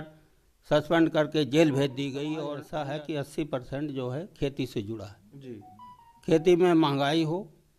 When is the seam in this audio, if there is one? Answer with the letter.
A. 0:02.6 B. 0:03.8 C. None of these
A